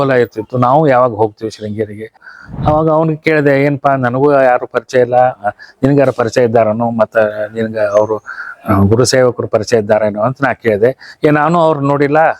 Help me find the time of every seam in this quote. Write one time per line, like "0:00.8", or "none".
0:02.3